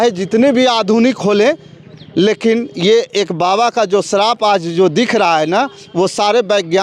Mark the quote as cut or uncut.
uncut